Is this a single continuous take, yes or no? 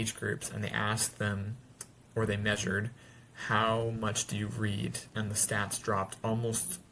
no